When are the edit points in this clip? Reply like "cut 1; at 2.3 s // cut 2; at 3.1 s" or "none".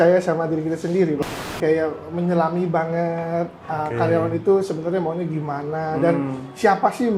cut 1; at 1.2 s